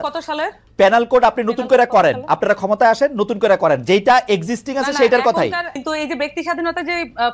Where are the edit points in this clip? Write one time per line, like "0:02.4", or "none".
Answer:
0:05.8